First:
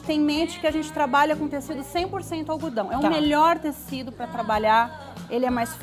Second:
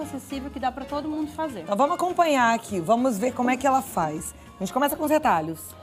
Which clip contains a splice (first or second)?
second